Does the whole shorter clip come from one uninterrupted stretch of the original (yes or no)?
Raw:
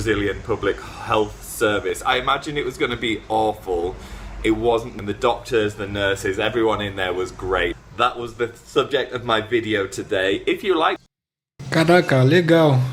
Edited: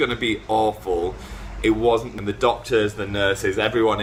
yes